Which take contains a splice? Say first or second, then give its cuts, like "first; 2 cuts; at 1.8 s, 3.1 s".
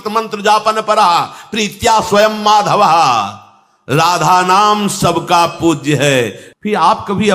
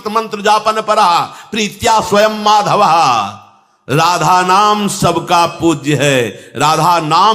first; 1 cut; at 6.4 s